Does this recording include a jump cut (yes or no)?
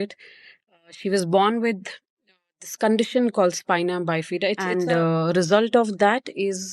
yes